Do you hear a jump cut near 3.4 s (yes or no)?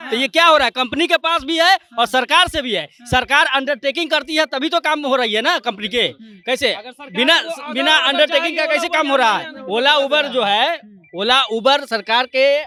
no